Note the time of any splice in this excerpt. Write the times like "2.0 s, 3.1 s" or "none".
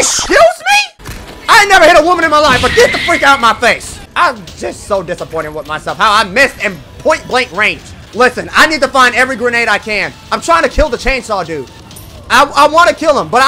none

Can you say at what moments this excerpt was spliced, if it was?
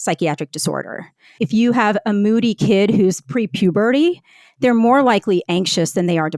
1.4 s

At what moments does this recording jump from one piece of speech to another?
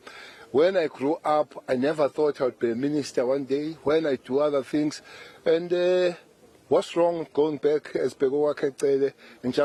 none

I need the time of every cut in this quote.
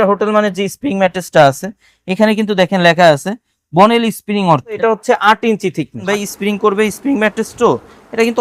4.8 s, 6.0 s

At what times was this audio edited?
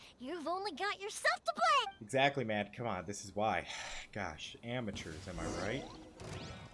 none

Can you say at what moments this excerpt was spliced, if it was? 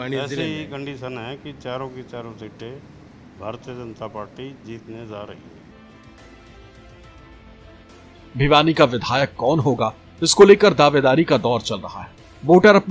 none

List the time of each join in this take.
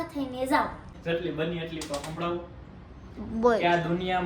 0.9 s

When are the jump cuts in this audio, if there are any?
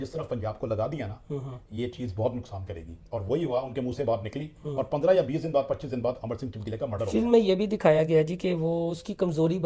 none

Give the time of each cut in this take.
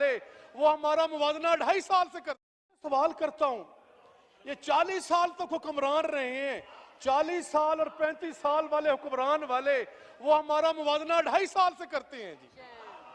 2.8 s

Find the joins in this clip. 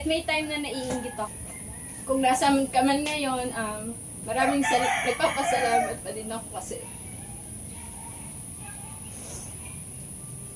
1.4 s

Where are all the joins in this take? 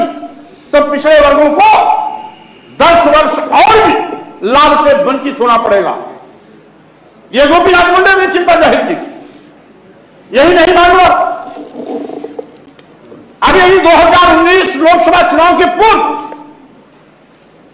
none

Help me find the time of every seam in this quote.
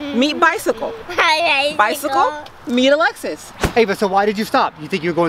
3.6 s

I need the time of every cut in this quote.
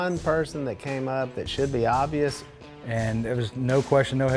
2.5 s

